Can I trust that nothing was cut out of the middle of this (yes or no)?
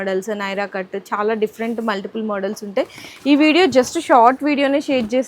yes